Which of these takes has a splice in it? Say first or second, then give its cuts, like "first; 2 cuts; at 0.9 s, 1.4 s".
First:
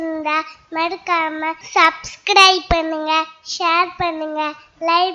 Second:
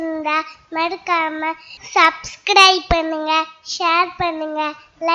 first; 1 cut; at 1.6 s